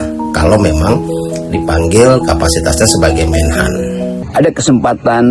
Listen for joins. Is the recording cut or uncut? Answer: cut